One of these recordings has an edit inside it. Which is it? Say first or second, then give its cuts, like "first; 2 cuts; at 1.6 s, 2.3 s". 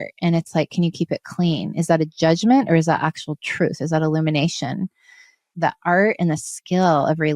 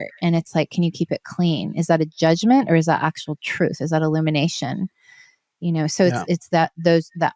first; 1 cut; at 5.5 s